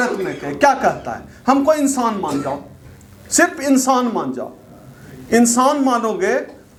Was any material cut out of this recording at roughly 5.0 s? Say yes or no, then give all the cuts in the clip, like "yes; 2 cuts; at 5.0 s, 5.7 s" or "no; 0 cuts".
no; 0 cuts